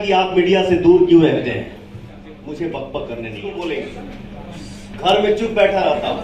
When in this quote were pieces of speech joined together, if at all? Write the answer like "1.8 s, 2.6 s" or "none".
3.5 s